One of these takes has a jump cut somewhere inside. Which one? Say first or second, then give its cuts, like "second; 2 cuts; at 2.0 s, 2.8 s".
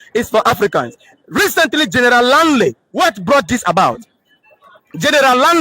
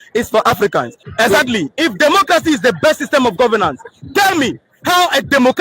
second; 1 cut; at 1.0 s